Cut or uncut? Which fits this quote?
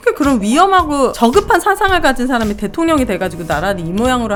uncut